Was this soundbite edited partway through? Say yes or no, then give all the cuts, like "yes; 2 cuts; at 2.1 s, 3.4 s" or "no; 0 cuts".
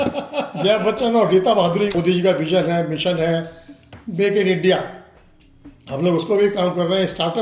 yes; 1 cut; at 1.9 s